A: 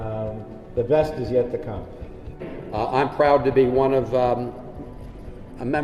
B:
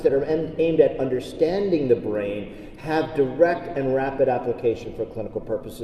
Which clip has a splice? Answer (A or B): A